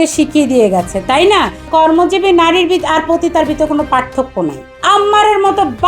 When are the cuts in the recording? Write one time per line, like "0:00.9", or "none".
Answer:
0:01.7
0:04.7